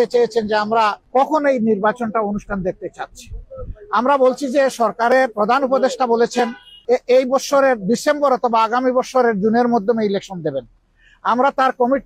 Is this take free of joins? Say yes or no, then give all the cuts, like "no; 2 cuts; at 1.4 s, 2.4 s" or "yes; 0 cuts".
no; 2 cuts; at 1.0 s, 6.7 s